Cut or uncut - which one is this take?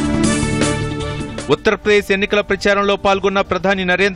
cut